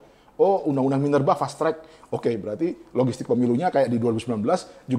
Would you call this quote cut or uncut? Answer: uncut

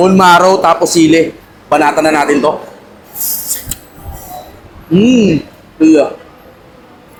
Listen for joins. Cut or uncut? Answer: uncut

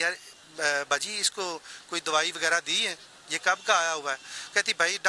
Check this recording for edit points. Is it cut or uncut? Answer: uncut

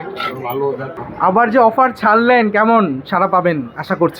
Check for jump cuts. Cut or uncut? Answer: cut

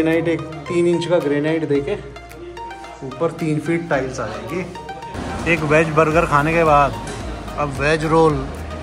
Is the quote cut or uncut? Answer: cut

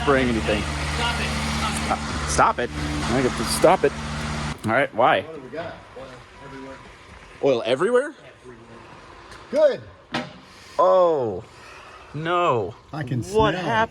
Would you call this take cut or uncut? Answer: cut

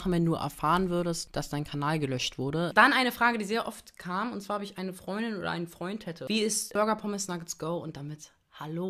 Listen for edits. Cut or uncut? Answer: cut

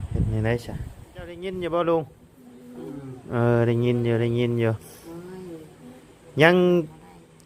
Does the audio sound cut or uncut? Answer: cut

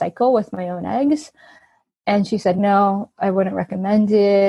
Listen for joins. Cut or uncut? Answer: cut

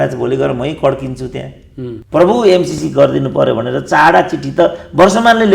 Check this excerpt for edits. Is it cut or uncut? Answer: cut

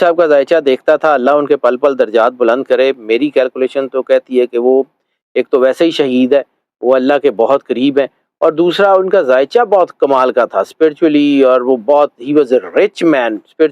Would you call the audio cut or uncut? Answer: uncut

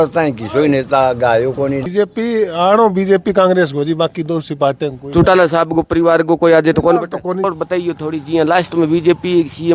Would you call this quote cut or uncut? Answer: cut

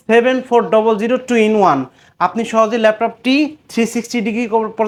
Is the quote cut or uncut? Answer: uncut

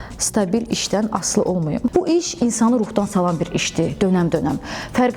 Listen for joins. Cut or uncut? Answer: cut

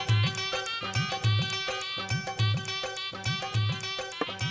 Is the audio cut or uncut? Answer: uncut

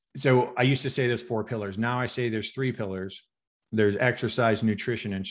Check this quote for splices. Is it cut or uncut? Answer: uncut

